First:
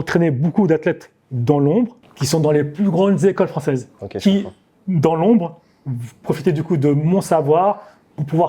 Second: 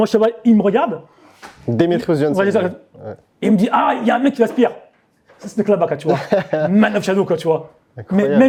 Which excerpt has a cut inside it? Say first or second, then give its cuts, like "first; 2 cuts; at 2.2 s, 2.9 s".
first; 2 cuts; at 2.1 s, 4.0 s